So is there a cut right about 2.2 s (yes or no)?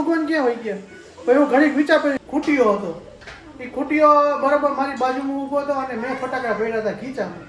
yes